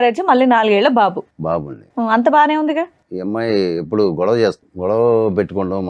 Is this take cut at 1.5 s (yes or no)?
no